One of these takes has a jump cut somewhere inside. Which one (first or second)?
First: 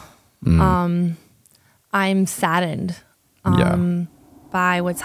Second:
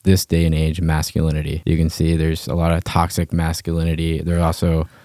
second